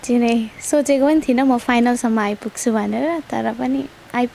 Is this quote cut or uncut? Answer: uncut